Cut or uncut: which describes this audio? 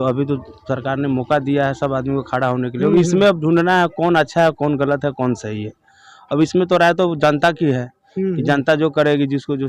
uncut